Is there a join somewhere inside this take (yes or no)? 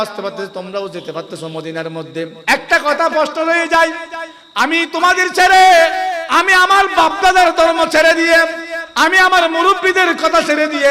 yes